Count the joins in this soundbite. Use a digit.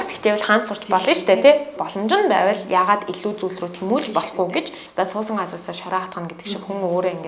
2